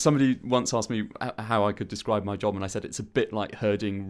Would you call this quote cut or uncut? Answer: uncut